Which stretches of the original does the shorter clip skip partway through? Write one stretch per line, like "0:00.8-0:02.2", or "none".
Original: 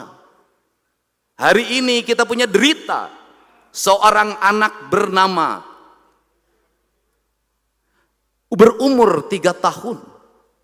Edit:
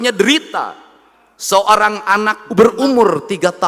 0:04.8-0:08.4